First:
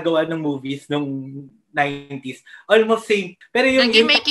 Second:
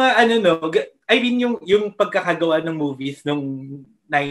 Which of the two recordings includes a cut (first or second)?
first